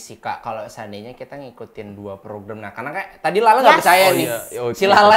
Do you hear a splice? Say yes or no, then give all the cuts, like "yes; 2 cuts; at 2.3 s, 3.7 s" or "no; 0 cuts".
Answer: no; 0 cuts